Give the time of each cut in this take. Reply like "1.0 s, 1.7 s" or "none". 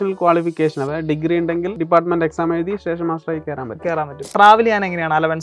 1.8 s, 4.3 s

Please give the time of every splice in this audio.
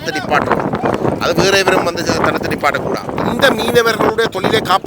3.2 s

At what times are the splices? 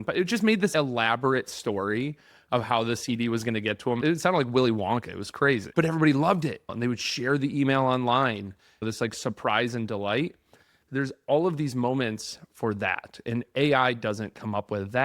4.0 s, 5.7 s, 6.7 s, 8.8 s

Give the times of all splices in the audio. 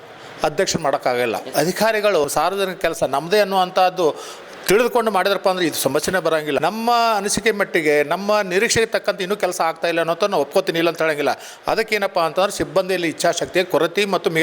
1.4 s, 2.2 s, 6.6 s

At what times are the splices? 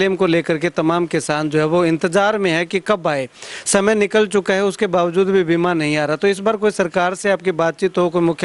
none

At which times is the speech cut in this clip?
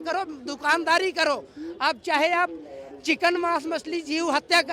none

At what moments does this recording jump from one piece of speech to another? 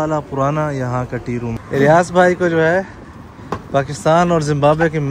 1.6 s

